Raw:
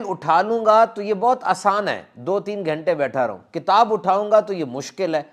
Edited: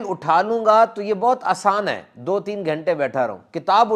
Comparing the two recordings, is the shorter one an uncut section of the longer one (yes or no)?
yes